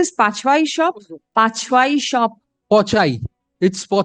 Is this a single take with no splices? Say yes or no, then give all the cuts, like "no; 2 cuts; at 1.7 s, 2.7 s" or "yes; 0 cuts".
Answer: no; 1 cut; at 1.1 s